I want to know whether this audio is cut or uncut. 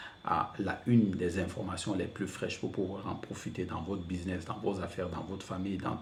uncut